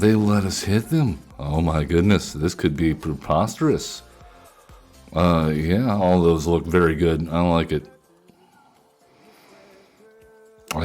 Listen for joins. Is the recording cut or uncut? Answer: cut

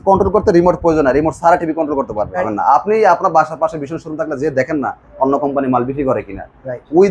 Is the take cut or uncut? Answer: cut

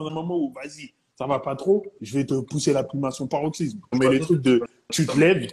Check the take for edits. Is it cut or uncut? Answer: cut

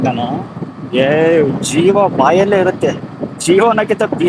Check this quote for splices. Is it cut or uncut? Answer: uncut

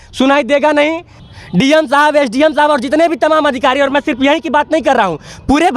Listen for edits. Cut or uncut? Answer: cut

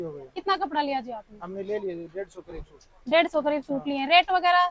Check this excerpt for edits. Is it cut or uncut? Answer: uncut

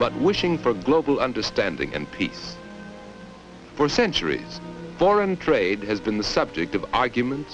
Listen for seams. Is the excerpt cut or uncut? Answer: cut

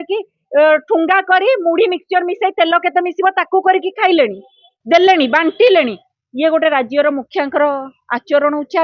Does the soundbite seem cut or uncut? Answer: uncut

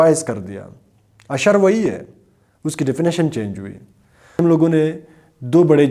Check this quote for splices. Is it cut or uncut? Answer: uncut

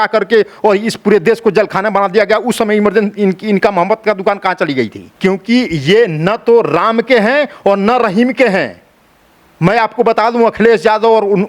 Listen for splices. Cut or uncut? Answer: cut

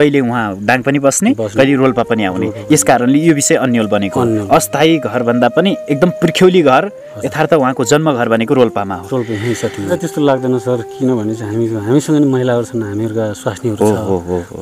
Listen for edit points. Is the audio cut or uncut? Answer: cut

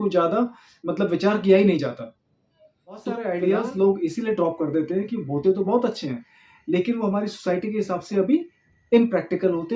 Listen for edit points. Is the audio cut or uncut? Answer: cut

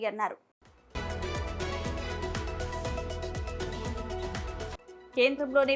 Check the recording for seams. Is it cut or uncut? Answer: cut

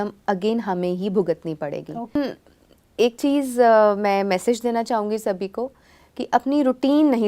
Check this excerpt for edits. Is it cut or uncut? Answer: cut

